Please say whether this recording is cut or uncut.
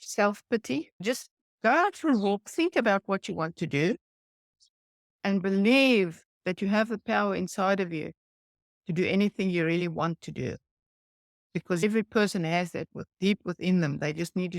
cut